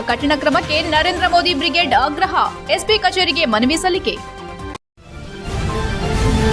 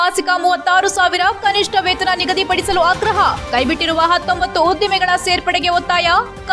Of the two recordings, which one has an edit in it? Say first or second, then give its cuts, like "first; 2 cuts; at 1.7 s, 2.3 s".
first; 1 cut; at 4.7 s